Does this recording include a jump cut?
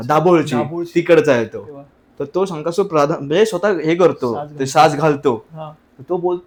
no; 0 cuts

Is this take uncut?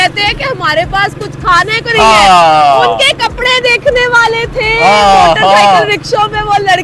yes; 0 cuts

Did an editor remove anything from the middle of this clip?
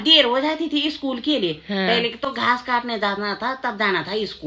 no; 0 cuts

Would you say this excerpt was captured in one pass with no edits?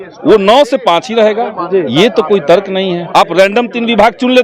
no; 1 cut; at 3.0 s

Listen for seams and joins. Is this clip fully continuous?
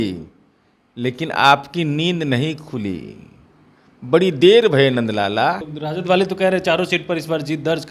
no; 1 cut; at 5.7 s

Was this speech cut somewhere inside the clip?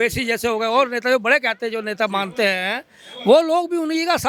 no; 0 cuts

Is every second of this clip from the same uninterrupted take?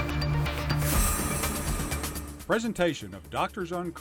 no; 1 cut; at 2.3 s

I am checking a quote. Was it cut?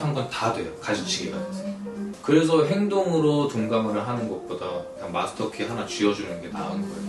no; 0 cuts

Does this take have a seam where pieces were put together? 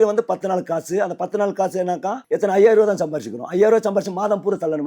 yes; 1 cut; at 2.2 s

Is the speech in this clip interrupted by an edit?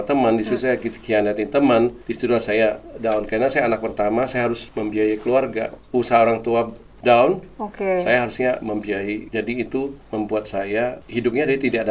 yes; 6 cuts; at 2.0 s, 4.7 s, 5.7 s, 9.3 s, 10.0 s, 11.0 s

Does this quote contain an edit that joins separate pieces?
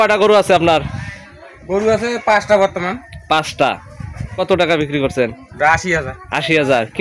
yes; 1 cut; at 4.4 s

